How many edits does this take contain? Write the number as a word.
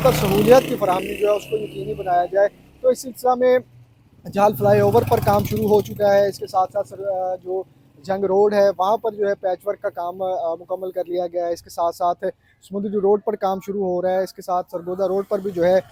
zero